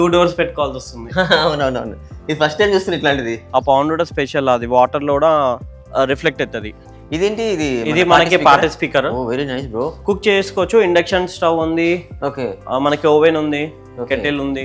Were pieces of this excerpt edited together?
yes; 3 cuts; at 3.5 s, 6.8 s, 9.9 s

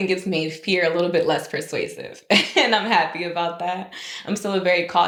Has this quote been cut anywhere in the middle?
no; 0 cuts

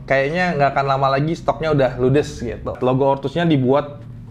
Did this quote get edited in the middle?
yes; 1 cut; at 2.8 s

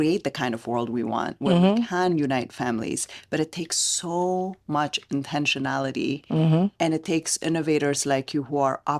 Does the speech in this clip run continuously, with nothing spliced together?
yes; 0 cuts

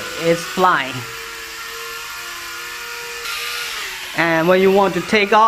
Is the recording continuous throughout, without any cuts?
no; 1 cut; at 3.3 s

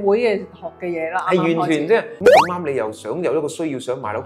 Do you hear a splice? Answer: yes; 1 cut; at 2.1 s

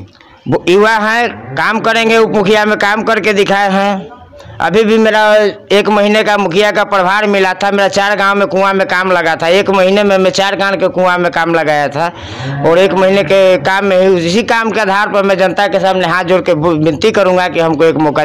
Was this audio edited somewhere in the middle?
no; 0 cuts

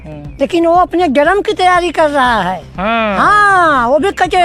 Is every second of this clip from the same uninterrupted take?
yes; 0 cuts

